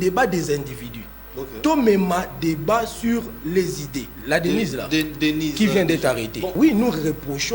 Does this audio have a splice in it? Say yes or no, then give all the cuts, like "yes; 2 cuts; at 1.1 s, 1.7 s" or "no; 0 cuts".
yes; 2 cuts; at 4.1 s, 6.4 s